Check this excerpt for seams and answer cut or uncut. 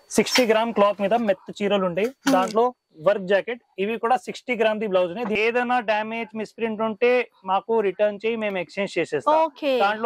cut